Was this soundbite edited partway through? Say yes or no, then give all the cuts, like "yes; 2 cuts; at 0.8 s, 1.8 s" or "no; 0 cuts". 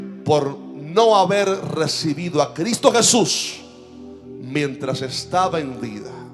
no; 0 cuts